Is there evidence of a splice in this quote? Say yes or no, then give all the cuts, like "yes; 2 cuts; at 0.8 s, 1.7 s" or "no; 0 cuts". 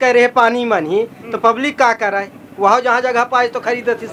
no; 0 cuts